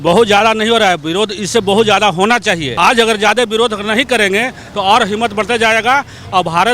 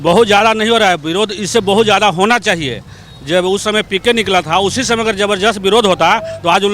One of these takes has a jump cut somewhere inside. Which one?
first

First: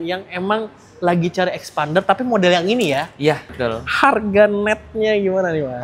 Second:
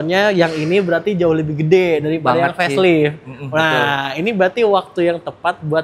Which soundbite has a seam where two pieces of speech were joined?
first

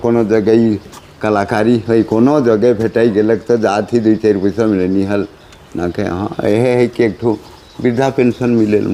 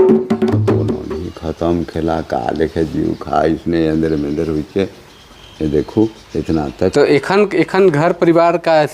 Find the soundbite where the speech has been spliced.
second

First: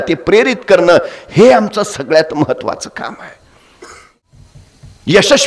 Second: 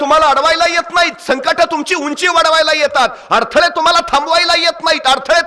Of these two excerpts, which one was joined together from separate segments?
first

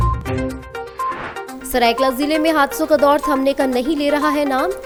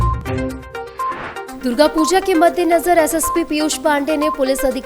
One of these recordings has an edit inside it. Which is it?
second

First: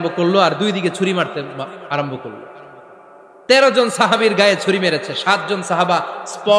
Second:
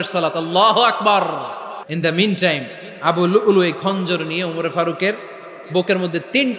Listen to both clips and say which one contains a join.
second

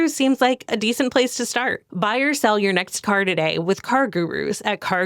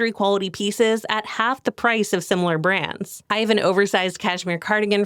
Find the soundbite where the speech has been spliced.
second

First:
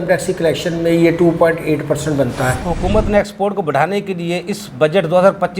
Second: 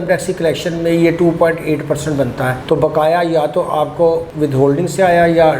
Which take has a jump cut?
first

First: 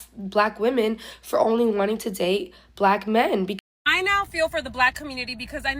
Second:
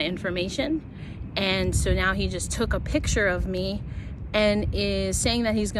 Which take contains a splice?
first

